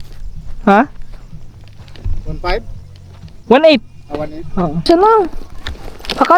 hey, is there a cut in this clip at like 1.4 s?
no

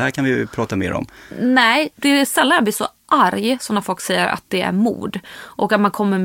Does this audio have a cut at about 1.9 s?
yes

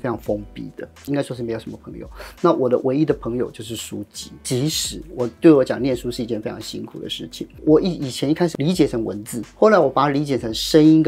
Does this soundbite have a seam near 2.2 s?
no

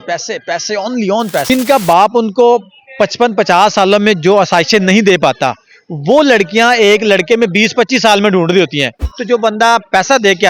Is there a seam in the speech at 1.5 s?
yes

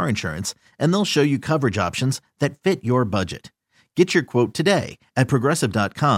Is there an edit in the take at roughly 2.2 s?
no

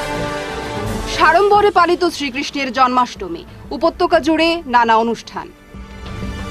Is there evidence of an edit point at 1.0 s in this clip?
yes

